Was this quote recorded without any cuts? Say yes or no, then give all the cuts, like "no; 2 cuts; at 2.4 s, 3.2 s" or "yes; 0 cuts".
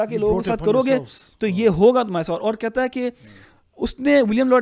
yes; 0 cuts